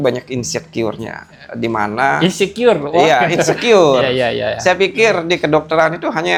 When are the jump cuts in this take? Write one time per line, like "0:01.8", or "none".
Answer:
none